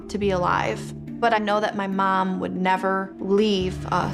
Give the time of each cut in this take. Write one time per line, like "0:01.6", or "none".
0:01.0
0:03.1